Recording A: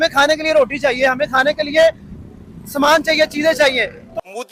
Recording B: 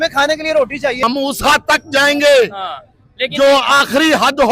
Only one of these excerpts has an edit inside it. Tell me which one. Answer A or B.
B